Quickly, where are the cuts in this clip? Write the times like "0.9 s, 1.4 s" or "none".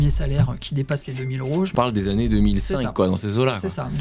1.7 s